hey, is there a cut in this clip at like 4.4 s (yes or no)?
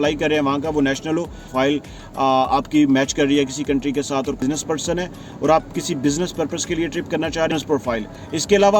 yes